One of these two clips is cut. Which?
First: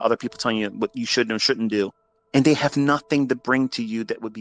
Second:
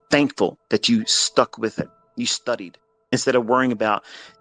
second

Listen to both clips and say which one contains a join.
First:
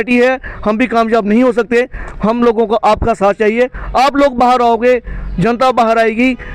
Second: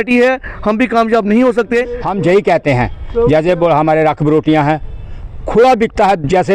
second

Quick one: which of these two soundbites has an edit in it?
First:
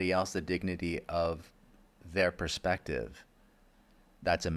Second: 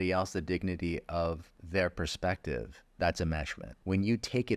second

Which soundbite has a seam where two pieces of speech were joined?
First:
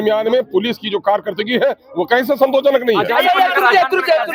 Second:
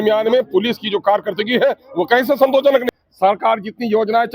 second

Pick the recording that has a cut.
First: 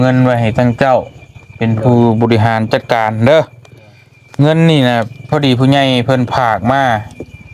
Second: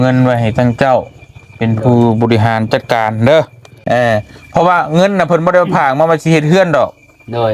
second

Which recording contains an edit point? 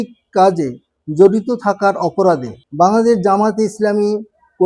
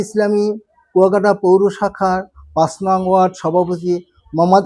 first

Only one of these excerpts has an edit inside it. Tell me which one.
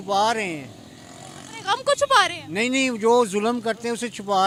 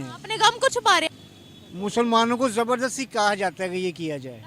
second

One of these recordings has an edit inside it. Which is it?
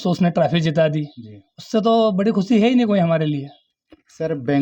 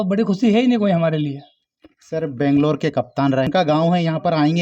second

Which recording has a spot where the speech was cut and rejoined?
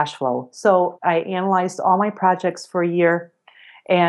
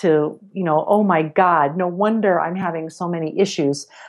first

